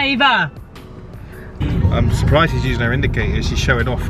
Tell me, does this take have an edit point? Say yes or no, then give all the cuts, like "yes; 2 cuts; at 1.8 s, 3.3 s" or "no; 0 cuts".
yes; 1 cut; at 1.6 s